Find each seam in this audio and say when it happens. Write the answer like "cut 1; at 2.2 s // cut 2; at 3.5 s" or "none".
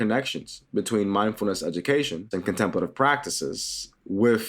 cut 1; at 2.3 s